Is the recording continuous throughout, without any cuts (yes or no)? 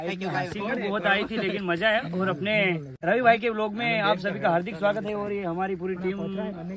no